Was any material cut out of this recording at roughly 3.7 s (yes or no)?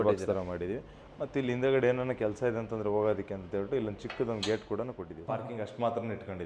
no